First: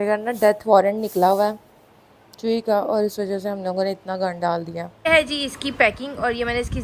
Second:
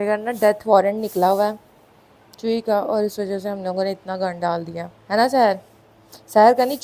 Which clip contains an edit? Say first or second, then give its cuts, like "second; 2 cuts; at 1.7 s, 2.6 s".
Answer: first; 1 cut; at 4.9 s